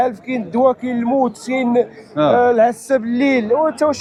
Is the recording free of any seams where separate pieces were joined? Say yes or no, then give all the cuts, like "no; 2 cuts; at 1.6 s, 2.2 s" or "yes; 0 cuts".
yes; 0 cuts